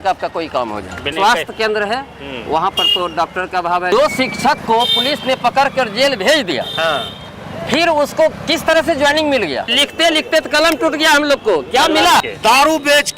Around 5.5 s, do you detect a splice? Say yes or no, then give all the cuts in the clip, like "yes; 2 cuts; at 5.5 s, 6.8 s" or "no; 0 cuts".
no; 4 cuts; at 1.1 s, 3.9 s, 9.7 s, 12.2 s